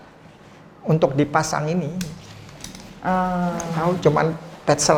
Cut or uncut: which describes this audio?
uncut